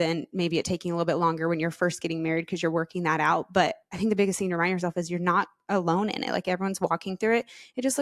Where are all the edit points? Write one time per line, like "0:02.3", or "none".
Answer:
none

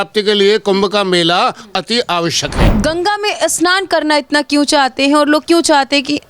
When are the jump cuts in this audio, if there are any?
0:02.5

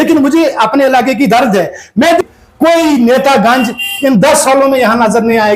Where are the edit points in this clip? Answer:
0:02.2

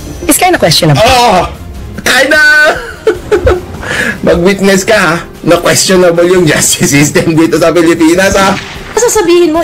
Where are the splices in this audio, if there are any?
0:08.3

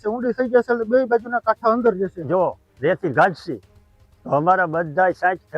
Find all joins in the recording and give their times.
0:02.2

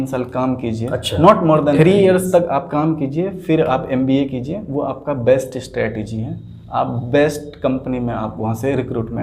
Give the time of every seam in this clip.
0:01.8

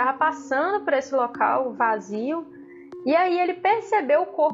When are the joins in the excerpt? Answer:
none

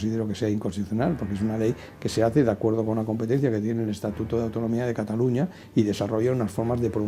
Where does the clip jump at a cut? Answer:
none

